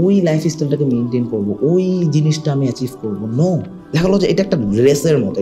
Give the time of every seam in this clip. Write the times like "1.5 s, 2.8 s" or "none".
3.8 s